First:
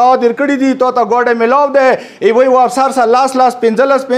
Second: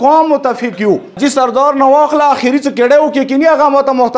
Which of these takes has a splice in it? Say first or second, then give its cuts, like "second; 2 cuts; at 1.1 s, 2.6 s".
second; 1 cut; at 1.2 s